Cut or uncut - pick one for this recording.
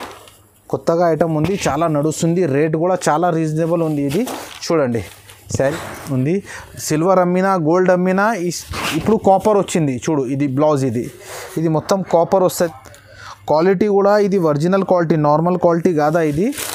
cut